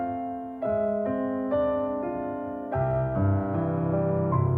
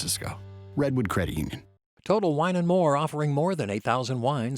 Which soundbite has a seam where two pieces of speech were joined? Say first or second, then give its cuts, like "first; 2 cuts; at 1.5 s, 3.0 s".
second; 1 cut; at 1.7 s